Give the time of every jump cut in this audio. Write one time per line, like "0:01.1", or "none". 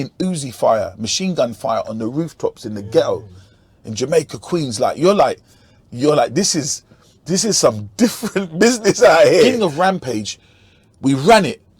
0:09.5